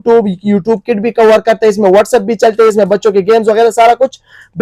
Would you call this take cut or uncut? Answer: uncut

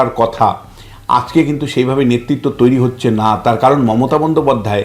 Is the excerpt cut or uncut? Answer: uncut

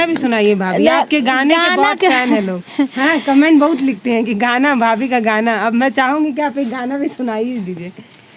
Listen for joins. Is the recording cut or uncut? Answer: uncut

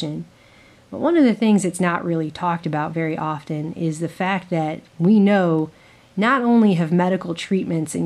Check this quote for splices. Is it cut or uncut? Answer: cut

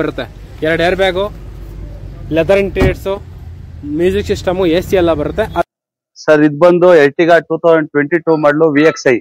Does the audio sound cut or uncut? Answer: cut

